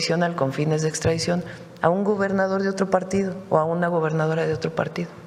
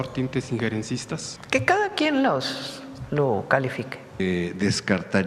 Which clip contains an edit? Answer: second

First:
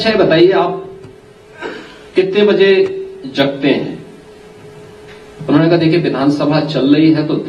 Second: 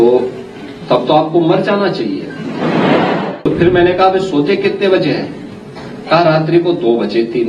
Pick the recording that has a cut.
second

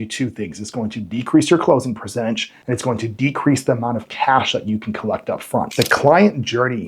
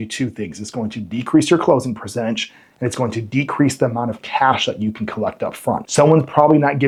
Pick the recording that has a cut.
first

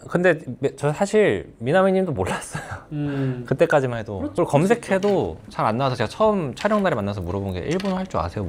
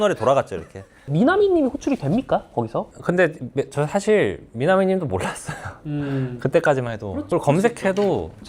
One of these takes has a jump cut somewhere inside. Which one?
second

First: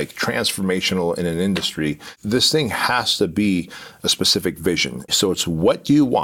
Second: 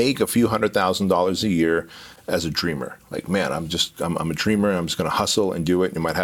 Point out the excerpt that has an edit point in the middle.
first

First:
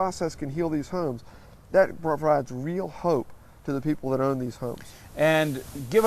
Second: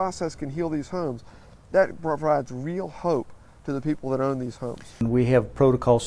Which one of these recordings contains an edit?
second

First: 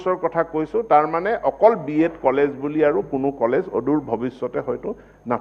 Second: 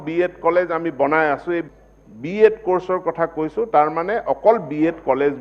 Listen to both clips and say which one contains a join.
second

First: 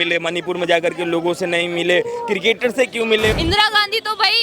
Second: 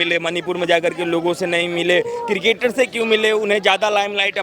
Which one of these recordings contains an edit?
first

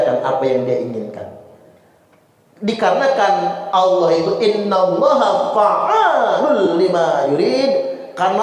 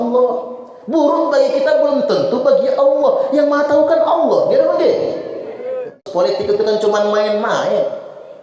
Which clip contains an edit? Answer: second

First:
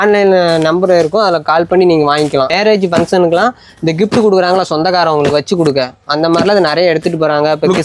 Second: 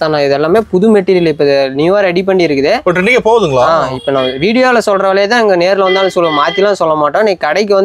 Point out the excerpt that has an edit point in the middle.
first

